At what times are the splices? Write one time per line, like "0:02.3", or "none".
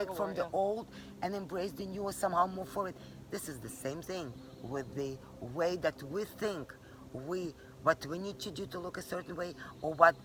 none